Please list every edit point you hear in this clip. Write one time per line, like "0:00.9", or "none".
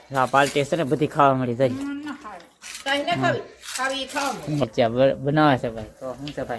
0:04.6